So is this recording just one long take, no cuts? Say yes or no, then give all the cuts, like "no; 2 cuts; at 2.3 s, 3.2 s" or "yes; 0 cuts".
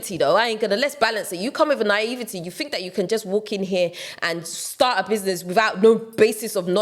yes; 0 cuts